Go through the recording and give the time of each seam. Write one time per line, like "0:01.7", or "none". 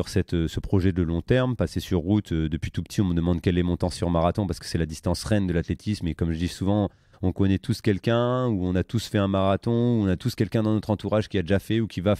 none